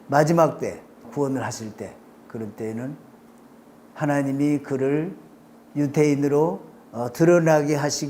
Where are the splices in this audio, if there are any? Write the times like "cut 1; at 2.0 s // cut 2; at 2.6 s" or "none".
cut 1; at 1.1 s